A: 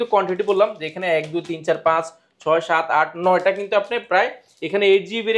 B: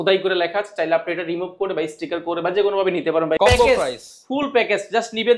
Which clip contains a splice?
B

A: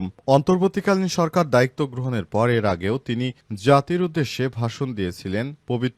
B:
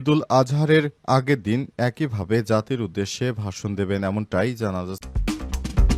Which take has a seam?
B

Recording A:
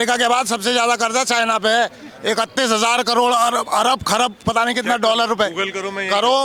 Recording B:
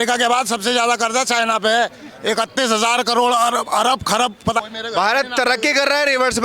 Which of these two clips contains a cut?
B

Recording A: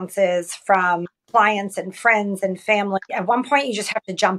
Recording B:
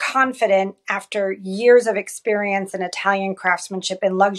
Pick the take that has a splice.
A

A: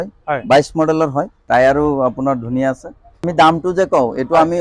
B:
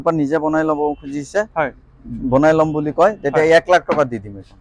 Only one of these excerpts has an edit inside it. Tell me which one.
A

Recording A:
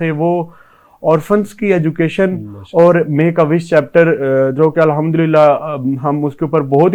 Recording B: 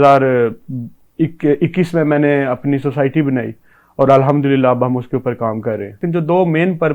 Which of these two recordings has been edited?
B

